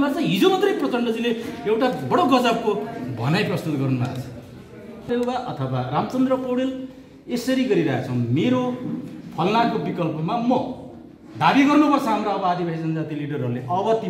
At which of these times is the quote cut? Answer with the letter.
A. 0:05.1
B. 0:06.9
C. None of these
A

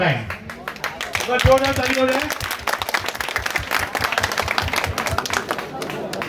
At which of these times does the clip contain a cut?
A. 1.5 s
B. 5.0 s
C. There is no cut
C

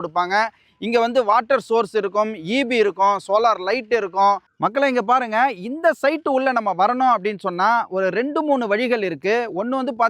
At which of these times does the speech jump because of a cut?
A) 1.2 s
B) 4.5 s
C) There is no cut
B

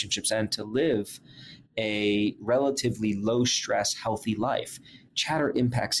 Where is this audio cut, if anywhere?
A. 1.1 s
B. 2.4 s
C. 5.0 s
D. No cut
B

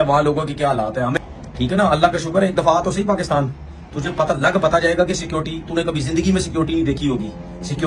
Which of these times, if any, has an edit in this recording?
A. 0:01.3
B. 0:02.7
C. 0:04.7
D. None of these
A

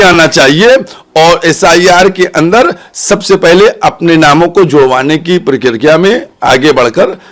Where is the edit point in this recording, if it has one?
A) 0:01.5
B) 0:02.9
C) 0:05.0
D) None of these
D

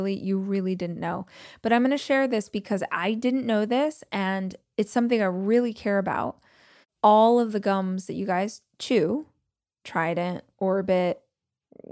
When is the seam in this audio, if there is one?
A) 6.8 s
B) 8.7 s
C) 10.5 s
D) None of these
A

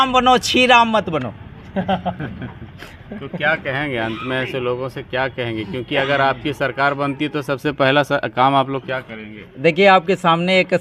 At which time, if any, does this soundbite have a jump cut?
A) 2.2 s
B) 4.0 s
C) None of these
C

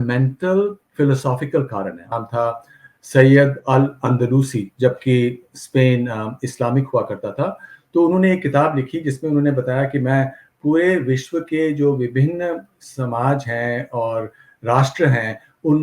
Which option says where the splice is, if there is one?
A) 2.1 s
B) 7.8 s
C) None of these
A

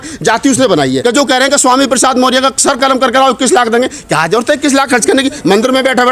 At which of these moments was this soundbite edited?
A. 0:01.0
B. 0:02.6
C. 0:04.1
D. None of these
A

